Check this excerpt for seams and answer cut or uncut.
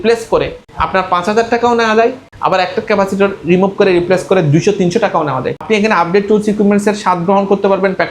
cut